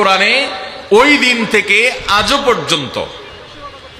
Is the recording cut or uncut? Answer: uncut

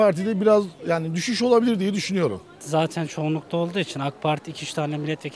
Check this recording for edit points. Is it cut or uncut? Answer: cut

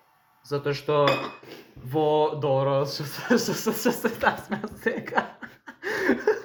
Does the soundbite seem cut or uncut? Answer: uncut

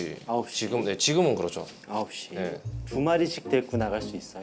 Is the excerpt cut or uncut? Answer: uncut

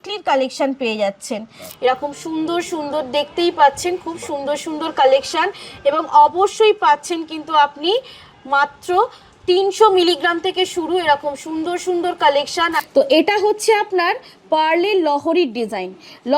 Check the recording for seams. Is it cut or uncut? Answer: cut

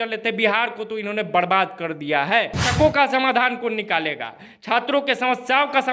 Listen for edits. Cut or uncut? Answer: cut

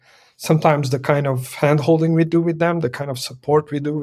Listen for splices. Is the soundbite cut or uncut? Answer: uncut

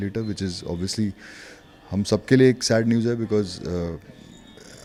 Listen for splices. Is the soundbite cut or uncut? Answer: uncut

